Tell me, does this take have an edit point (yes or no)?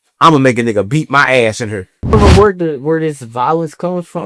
yes